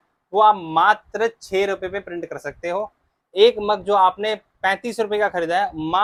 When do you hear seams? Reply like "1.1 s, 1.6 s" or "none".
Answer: none